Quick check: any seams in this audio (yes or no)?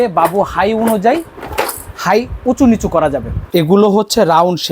yes